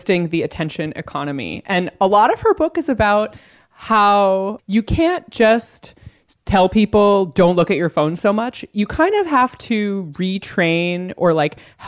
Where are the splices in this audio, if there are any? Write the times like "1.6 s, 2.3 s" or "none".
4.6 s